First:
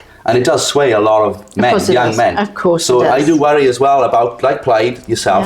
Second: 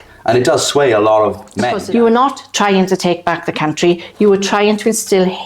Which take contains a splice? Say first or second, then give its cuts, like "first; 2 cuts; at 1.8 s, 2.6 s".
second; 1 cut; at 1.7 s